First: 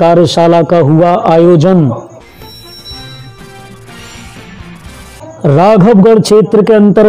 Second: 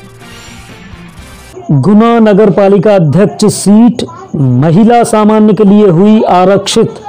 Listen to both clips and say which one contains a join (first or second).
first